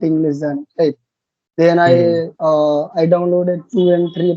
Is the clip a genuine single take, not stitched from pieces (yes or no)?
yes